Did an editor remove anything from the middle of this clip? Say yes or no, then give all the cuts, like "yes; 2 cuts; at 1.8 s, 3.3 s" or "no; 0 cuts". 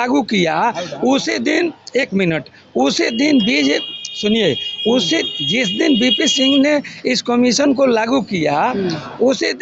no; 0 cuts